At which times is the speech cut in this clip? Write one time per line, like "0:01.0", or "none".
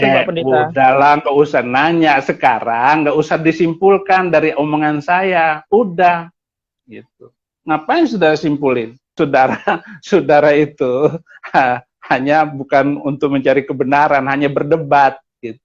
none